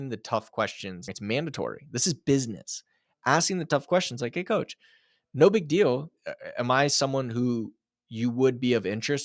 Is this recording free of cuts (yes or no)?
no